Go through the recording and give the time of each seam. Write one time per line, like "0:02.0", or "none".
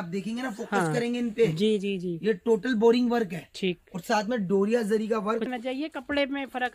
0:05.5